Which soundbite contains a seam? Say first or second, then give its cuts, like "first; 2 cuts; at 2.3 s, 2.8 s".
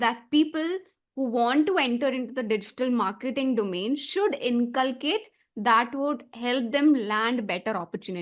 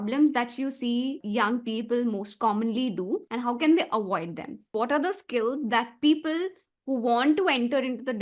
second; 3 cuts; at 1.2 s, 3.3 s, 4.7 s